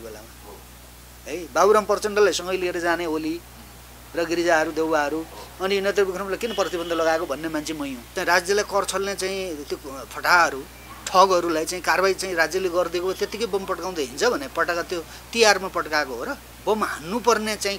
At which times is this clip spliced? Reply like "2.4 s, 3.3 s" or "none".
8.0 s, 16.4 s